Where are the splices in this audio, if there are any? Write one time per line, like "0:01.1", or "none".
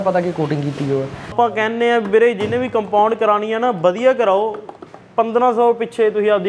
0:01.3